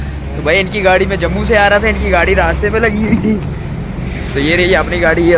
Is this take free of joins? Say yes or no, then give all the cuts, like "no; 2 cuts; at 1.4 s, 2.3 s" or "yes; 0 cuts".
yes; 0 cuts